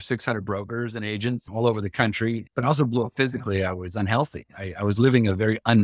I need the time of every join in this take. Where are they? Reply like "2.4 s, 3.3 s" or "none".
1.5 s, 2.5 s